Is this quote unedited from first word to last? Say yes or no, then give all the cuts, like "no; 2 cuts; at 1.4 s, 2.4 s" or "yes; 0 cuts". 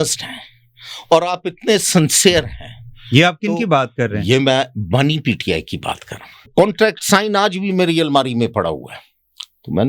no; 1 cut; at 6.4 s